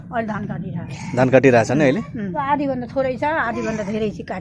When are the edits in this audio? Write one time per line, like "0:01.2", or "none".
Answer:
0:02.3